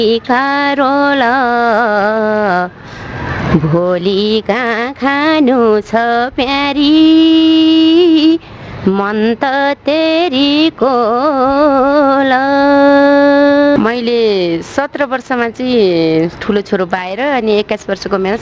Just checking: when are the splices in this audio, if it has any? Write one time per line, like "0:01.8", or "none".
0:13.8